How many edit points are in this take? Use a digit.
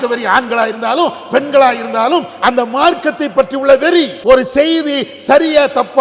1